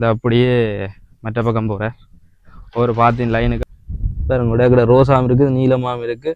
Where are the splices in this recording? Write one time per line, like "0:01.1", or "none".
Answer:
0:03.6